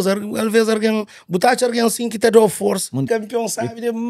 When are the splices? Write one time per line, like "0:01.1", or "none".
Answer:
0:03.1